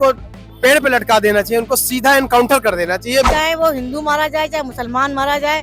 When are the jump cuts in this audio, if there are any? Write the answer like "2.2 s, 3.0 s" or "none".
3.3 s